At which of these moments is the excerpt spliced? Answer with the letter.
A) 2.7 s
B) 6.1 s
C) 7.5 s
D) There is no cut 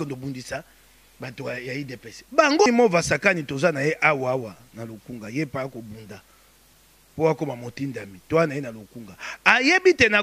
A